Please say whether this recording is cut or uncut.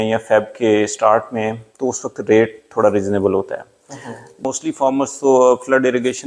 cut